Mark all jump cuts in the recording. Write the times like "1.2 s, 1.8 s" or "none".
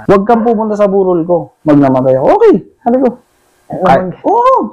1.5 s